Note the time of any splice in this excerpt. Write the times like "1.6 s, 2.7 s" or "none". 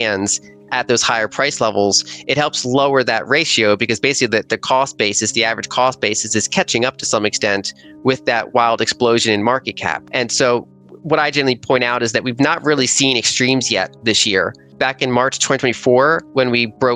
10.0 s, 14.7 s